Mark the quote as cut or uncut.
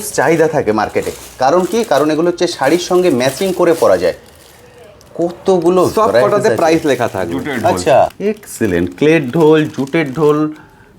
cut